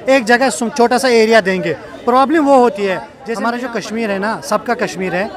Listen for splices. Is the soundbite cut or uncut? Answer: cut